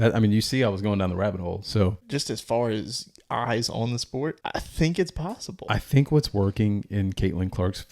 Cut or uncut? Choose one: cut